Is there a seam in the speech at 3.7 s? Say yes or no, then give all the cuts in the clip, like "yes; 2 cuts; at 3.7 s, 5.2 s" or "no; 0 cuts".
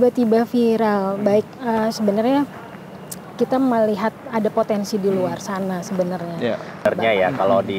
no; 1 cut; at 6.9 s